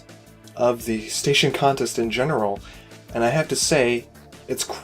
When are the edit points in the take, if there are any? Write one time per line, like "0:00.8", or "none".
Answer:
0:01.6

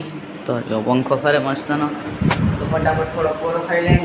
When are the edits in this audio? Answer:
none

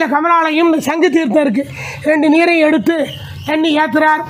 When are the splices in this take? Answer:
none

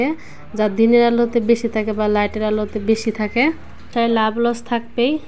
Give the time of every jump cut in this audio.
0:03.9

